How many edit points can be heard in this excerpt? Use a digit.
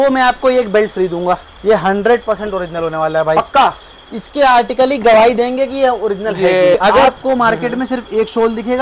2